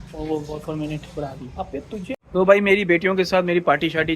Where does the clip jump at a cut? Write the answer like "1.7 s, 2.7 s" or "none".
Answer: 2.2 s